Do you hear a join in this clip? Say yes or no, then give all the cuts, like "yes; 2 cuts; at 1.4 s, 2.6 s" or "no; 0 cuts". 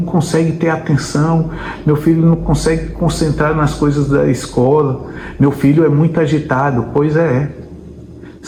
no; 0 cuts